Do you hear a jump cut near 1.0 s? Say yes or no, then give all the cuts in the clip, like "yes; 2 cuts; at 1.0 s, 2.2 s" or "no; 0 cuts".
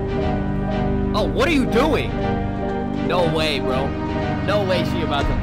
no; 0 cuts